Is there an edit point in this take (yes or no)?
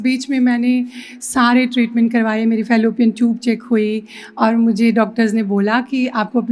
no